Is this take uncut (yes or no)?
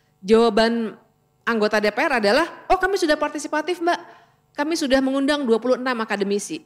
yes